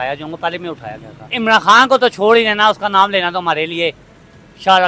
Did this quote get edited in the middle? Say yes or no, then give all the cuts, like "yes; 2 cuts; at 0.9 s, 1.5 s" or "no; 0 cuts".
yes; 1 cut; at 1.2 s